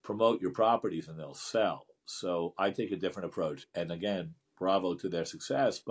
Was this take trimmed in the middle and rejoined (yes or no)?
yes